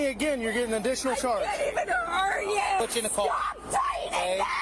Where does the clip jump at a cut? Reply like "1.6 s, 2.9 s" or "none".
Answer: 2.8 s